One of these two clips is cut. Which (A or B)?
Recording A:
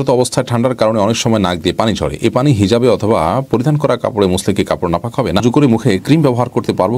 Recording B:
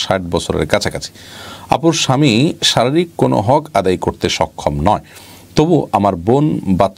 A